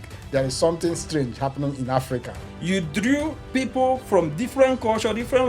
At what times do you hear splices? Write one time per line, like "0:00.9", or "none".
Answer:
0:02.5